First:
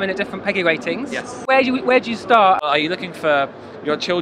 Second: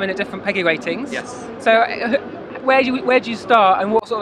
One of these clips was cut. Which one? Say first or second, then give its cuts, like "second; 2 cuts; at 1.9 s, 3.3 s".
first; 2 cuts; at 1.3 s, 2.6 s